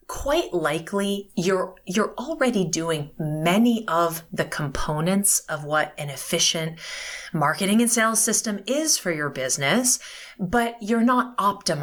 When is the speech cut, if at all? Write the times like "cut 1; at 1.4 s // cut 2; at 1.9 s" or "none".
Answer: none